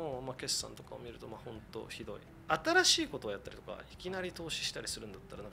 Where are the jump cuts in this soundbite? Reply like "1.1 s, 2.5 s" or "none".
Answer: 2.3 s